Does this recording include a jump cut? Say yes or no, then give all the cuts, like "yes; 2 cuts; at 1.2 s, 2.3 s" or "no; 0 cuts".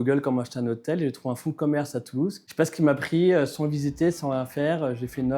no; 0 cuts